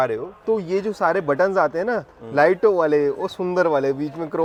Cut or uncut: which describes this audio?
uncut